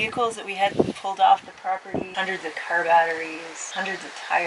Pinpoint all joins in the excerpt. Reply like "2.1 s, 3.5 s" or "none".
2.0 s, 3.6 s